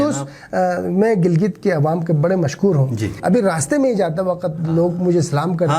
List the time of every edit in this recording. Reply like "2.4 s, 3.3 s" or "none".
3.1 s